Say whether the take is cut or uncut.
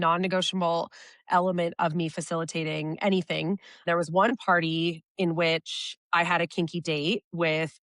cut